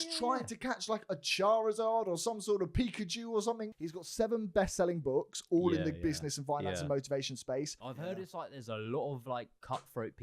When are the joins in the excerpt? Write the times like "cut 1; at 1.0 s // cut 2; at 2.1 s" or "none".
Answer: cut 1; at 3.8 s // cut 2; at 7.8 s